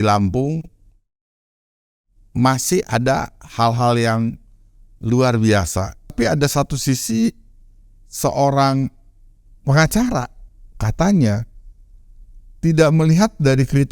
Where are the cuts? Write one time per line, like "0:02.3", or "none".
0:06.1